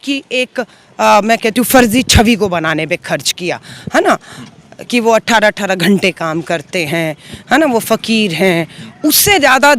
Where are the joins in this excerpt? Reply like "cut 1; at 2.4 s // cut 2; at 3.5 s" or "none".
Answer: none